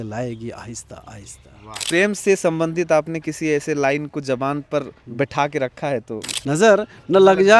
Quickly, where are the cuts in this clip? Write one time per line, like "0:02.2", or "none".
0:01.8
0:06.3